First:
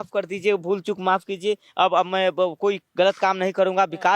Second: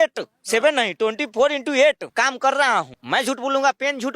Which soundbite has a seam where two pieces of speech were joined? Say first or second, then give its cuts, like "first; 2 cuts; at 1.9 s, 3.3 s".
second; 2 cuts; at 2.0 s, 3.0 s